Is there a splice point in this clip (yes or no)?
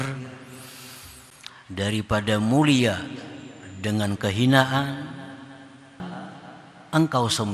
yes